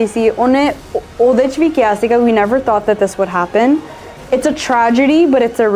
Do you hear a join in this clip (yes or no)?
no